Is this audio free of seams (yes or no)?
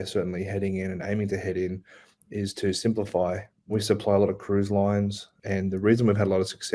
no